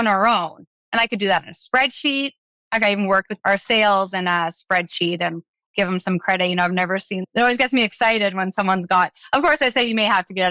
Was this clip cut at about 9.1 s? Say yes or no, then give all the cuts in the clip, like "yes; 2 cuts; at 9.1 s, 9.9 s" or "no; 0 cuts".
no; 2 cuts; at 3.3 s, 7.2 s